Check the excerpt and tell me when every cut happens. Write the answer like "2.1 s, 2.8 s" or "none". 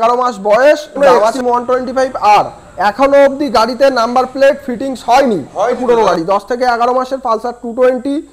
1.0 s, 5.8 s